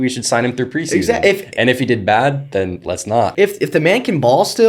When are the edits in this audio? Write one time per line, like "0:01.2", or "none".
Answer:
0:03.3